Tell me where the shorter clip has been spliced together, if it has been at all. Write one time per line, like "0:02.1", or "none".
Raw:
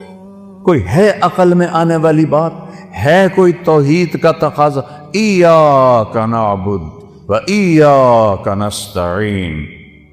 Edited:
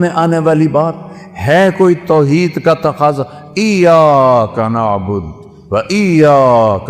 none

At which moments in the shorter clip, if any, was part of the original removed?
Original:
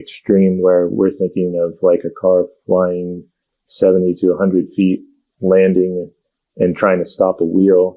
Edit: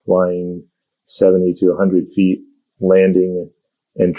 none

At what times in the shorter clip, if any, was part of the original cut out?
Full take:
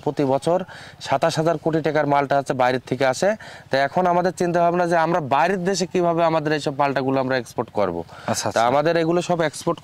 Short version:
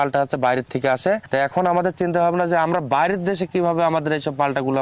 0:01.2

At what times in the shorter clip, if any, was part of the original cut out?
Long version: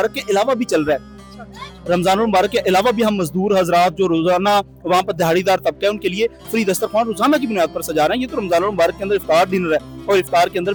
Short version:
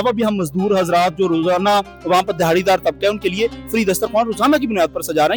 none

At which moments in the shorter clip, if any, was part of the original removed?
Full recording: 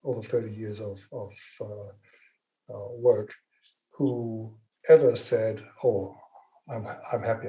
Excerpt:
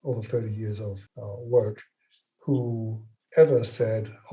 0:01.0

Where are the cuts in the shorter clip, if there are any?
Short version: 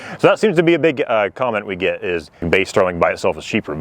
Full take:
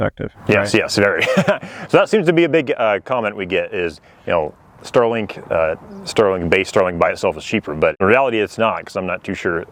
0:02.4

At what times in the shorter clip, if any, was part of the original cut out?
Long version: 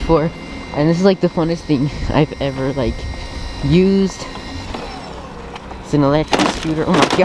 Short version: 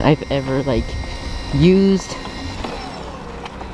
none

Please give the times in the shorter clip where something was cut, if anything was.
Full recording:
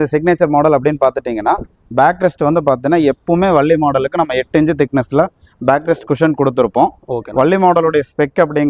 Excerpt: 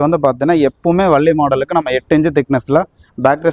none

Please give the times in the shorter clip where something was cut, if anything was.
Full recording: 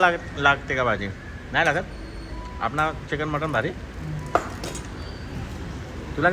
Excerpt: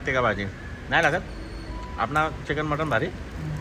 none

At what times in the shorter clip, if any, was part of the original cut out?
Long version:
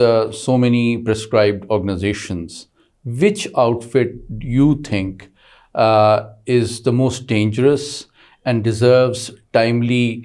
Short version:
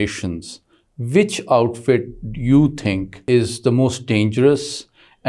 0:03.1

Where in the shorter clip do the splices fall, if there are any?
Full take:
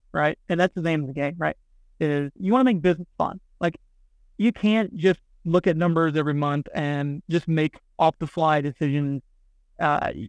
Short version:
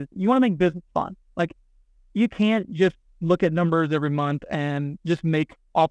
none

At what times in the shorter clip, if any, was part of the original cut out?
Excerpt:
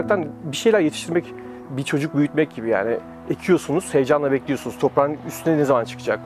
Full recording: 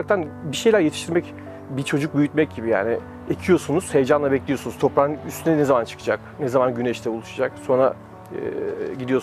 none

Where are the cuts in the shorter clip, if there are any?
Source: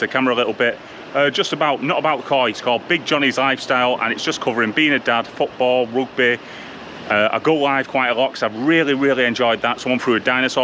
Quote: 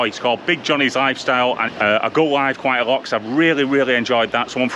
0:01.7

